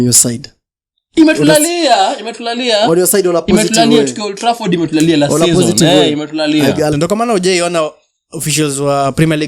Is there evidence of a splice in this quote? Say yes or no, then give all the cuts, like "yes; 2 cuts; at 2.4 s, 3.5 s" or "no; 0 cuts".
yes; 1 cut; at 6.9 s